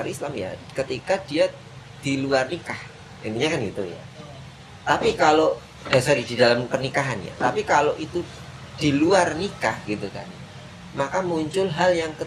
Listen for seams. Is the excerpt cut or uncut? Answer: uncut